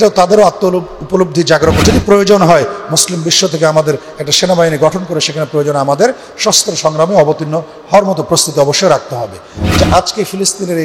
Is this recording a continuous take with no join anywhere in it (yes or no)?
no